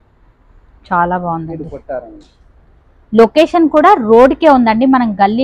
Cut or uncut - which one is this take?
uncut